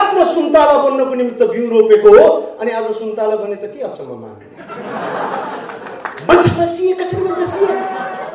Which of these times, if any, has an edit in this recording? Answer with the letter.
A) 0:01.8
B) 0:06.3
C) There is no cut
B